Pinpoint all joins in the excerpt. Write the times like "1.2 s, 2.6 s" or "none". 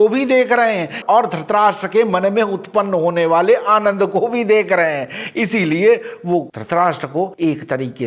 none